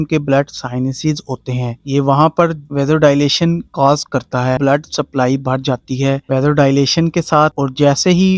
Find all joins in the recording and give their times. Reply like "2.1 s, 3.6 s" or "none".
4.6 s